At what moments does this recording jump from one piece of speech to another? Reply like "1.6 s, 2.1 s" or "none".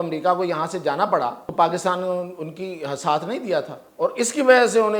1.4 s, 3.8 s